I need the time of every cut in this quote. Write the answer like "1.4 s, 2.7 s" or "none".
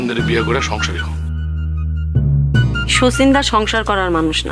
none